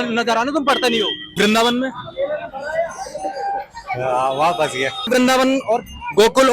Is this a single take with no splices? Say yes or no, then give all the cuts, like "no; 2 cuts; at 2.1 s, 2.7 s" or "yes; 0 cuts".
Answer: no; 2 cuts; at 1.3 s, 5.1 s